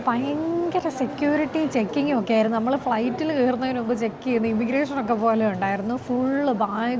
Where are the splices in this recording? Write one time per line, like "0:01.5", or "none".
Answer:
none